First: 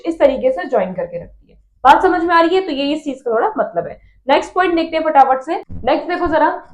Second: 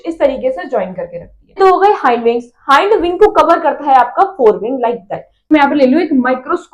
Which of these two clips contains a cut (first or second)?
second